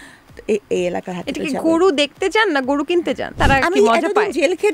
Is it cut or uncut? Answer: cut